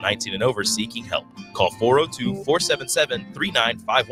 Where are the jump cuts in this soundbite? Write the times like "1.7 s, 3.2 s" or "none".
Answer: none